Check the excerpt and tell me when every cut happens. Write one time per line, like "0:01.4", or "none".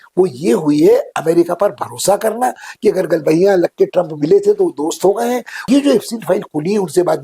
0:05.7